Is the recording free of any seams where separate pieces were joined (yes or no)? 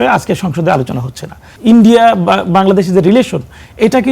no